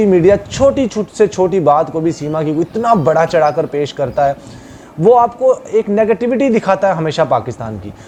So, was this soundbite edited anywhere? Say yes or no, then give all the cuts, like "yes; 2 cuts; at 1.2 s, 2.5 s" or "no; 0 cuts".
no; 0 cuts